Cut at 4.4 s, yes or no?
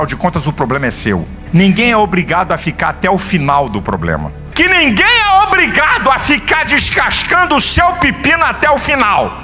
yes